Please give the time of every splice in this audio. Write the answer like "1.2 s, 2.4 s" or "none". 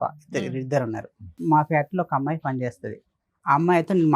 1.4 s